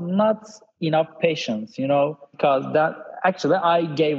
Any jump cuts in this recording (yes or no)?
yes